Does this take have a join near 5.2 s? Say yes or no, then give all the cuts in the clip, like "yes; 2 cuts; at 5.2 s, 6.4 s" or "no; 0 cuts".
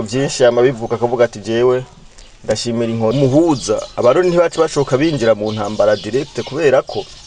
no; 1 cut; at 3.1 s